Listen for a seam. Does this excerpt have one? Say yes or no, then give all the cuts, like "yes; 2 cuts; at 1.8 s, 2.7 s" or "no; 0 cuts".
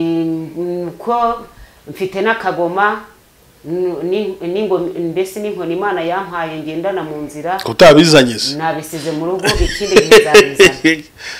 no; 0 cuts